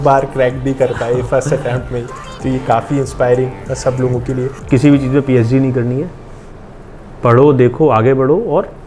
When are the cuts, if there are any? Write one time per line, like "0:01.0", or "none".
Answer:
0:04.5